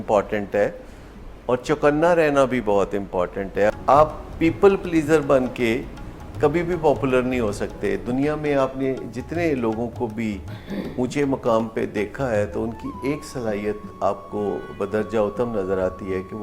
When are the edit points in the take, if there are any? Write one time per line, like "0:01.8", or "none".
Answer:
0:03.8